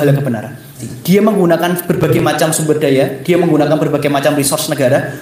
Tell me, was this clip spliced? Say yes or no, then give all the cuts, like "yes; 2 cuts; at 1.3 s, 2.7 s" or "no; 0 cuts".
yes; 1 cut; at 0.9 s